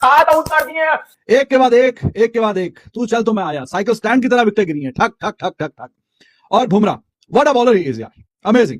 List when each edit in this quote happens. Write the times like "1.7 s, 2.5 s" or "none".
1.1 s